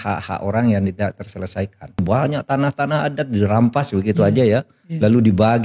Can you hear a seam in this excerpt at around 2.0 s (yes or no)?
yes